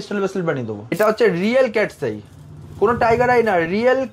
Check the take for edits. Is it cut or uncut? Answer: cut